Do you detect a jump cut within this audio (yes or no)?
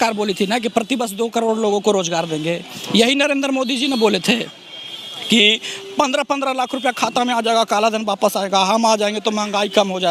no